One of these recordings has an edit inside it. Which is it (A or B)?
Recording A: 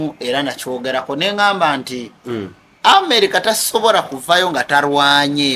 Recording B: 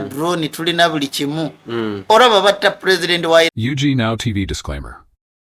B